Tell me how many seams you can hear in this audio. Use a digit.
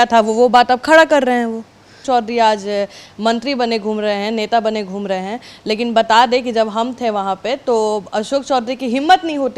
1